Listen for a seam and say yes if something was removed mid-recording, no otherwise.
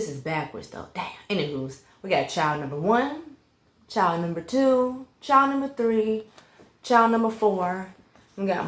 no